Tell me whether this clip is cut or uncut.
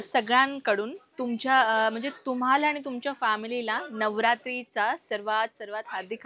uncut